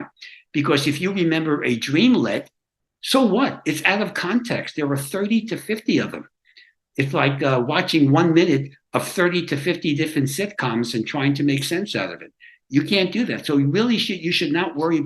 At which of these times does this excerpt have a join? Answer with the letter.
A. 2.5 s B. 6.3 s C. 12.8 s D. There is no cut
D